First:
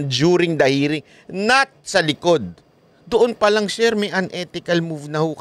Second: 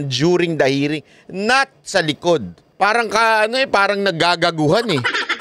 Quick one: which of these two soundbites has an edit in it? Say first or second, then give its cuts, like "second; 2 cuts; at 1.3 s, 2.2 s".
second; 1 cut; at 2.6 s